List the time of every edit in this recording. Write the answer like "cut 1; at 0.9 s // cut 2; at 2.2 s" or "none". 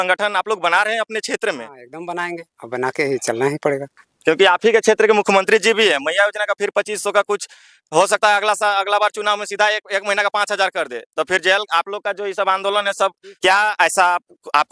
cut 1; at 13.3 s